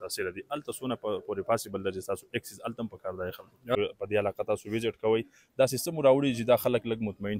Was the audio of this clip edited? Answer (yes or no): yes